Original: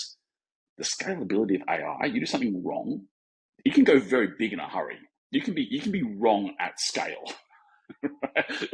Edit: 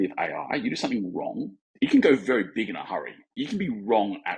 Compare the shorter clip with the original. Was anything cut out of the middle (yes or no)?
yes